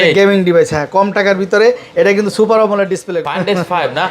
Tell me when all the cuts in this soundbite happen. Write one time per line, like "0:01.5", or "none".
0:03.2